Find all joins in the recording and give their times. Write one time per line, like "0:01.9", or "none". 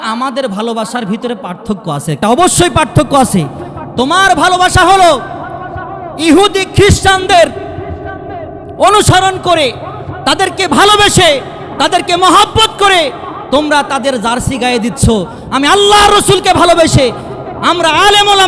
0:02.2